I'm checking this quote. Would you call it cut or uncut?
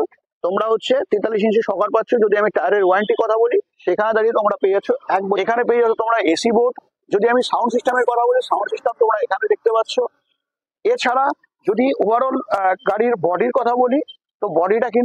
cut